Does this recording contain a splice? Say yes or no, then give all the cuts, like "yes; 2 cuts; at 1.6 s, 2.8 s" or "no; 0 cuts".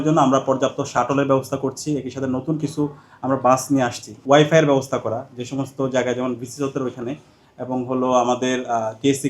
yes; 1 cut; at 4.1 s